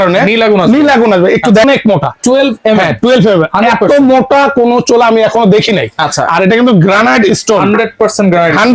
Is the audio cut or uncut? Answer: cut